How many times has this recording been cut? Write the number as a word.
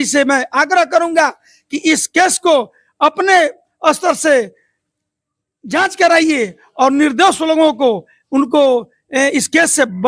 zero